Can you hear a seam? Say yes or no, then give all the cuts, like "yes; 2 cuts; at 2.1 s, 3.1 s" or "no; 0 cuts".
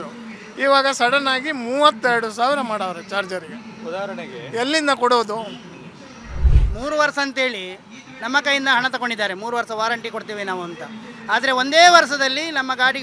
no; 0 cuts